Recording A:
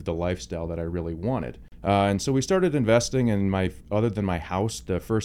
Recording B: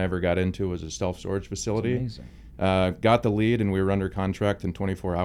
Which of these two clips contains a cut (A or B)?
A